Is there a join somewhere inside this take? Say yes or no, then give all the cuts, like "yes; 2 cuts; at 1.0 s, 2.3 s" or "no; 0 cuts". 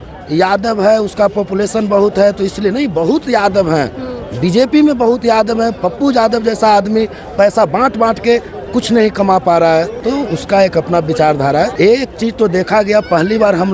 yes; 2 cuts; at 10.0 s, 11.7 s